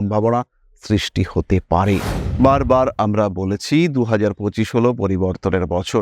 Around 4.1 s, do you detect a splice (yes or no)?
no